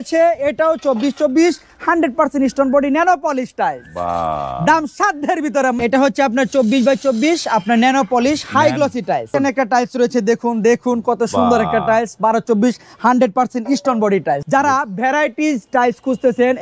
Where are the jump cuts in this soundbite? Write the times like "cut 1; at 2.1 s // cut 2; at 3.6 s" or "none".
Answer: cut 1; at 5.8 s // cut 2; at 9.3 s // cut 3; at 14.4 s